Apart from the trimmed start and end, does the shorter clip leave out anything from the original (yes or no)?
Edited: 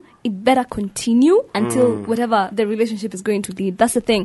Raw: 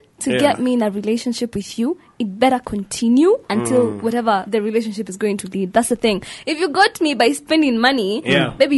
no